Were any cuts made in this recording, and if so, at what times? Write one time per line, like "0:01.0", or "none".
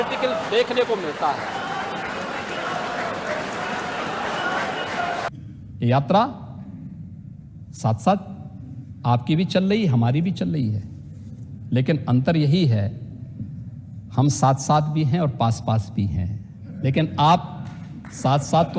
0:05.3

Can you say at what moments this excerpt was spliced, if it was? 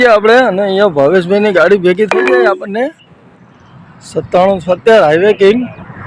none

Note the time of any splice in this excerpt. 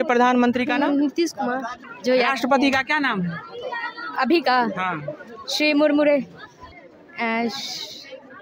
0:01.8
0:06.5

